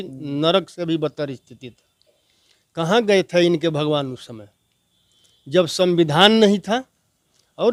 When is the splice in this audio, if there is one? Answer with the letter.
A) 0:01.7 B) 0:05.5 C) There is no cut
C